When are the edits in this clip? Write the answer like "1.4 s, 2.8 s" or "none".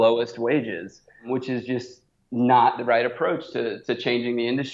1.2 s